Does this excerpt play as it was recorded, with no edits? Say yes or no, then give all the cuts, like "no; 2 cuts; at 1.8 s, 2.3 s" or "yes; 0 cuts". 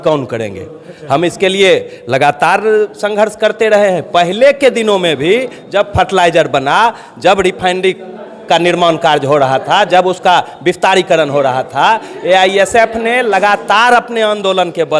yes; 0 cuts